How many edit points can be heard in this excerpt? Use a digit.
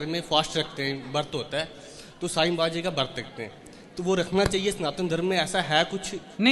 0